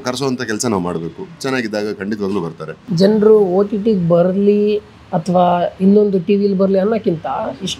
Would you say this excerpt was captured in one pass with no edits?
yes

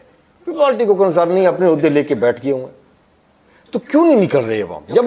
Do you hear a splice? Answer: no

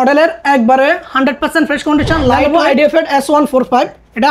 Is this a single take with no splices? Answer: no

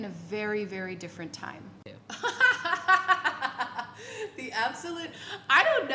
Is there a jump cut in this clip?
yes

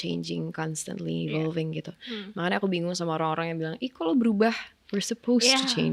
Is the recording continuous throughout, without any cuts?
yes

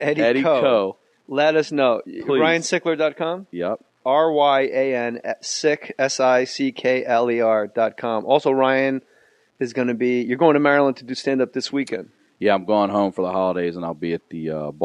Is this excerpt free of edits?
no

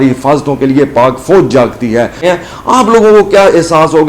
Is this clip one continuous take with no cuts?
no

